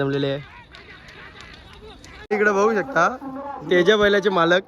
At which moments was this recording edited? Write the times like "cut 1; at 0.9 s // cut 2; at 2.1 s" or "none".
cut 1; at 2.3 s

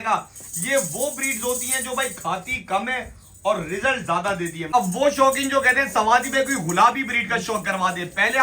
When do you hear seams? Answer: cut 1; at 4.6 s

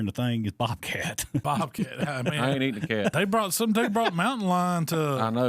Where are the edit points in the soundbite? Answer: cut 1; at 1.4 s // cut 2; at 3.1 s

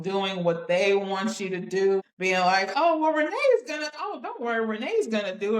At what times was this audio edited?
cut 1; at 2.0 s

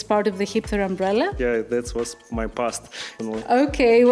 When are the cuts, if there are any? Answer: cut 1; at 1.3 s // cut 2; at 3.2 s

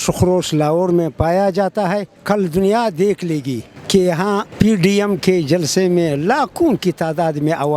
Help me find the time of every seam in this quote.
none

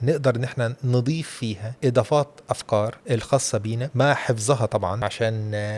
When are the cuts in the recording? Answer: cut 1; at 1.7 s // cut 2; at 3.0 s // cut 3; at 3.9 s // cut 4; at 5.0 s

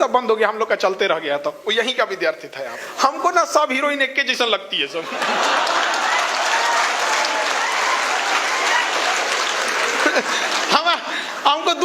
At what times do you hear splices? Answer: cut 1; at 2.8 s

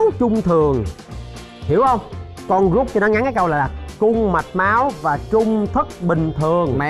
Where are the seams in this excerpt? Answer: cut 1; at 2.4 s

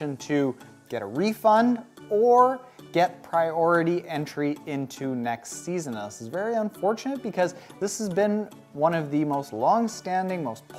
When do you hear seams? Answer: none

